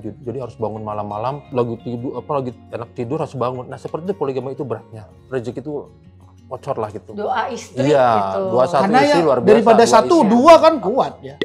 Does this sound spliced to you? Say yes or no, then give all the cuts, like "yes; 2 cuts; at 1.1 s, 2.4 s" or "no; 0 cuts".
yes; 2 cuts; at 1.5 s, 5.1 s